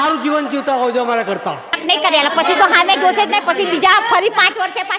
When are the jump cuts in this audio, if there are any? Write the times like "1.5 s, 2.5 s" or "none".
1.8 s